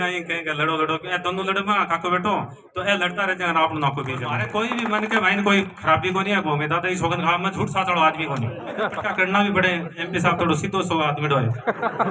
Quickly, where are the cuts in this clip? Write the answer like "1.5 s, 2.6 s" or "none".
4.4 s, 8.9 s